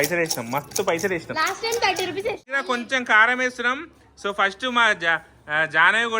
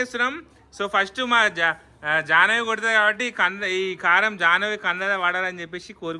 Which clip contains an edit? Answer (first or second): first